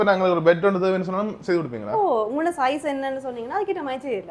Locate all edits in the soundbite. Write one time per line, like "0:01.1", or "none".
none